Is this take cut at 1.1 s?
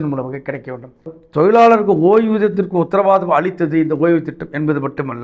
yes; 1 cut; at 1.1 s

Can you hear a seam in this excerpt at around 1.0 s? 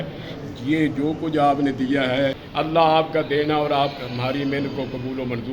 no; 1 cut; at 2.4 s

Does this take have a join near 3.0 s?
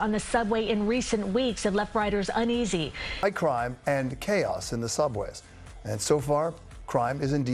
no; 0 cuts

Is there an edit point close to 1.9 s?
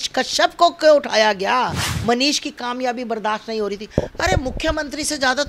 yes; 1 cut; at 1.9 s

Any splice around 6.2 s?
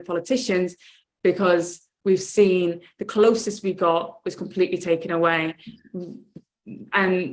no; 0 cuts

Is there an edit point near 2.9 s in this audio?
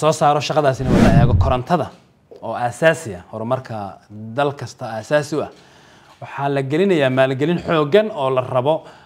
no; 1 cut; at 1.0 s

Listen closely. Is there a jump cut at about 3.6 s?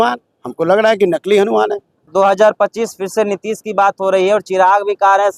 no; 1 cut; at 2.0 s

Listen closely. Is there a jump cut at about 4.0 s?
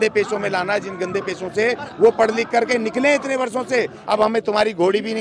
yes; 1 cut; at 4.0 s

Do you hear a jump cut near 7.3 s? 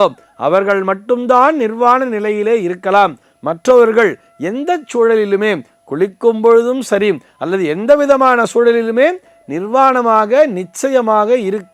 no; 0 cuts

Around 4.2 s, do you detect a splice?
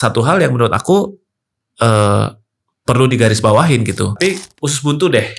yes; 1 cut; at 4.2 s

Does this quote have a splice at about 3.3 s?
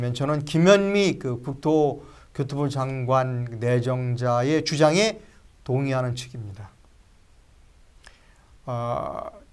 no; 0 cuts

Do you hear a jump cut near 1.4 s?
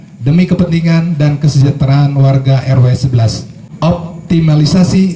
no; 1 cut; at 3.6 s

